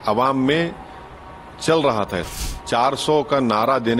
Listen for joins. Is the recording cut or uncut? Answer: cut